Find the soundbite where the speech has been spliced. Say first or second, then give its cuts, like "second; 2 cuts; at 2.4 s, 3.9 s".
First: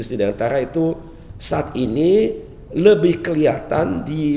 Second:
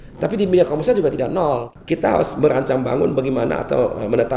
second; 1 cut; at 1.7 s